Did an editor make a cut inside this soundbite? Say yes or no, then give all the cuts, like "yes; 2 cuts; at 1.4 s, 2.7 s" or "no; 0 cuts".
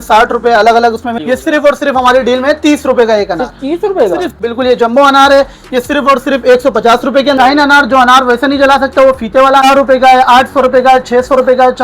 yes; 4 cuts; at 1.2 s, 4.4 s, 7.4 s, 9.6 s